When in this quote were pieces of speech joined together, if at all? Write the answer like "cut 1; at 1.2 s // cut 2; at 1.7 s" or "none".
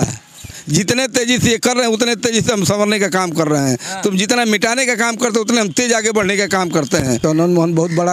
cut 1; at 7.2 s